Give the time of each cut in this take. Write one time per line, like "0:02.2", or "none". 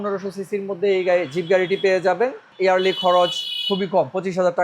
0:02.5